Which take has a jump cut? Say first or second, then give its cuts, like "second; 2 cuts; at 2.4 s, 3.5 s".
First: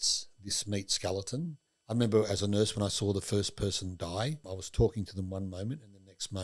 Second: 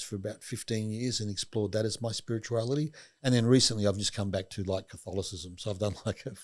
first; 1 cut; at 4.6 s